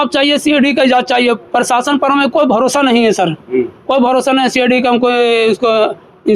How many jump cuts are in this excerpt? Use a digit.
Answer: 0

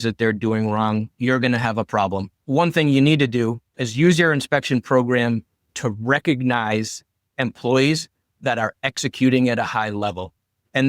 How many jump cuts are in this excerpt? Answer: 1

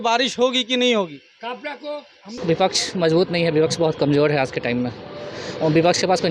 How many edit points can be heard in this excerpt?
1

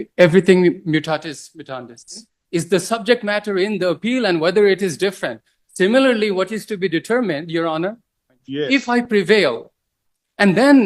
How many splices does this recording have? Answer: 2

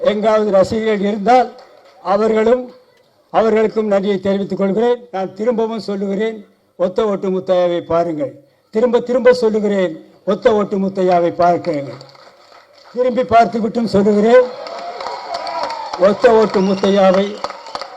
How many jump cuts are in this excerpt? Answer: 1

